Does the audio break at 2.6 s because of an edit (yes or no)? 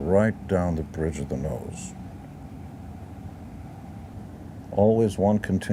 no